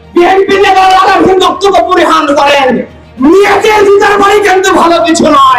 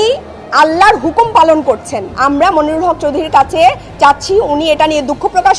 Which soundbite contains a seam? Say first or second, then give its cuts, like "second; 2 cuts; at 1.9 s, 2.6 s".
second; 1 cut; at 2.0 s